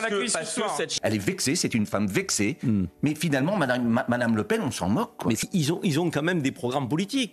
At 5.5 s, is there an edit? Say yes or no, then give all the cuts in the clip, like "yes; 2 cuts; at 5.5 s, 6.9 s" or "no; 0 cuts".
yes; 2 cuts; at 0.9 s, 5.5 s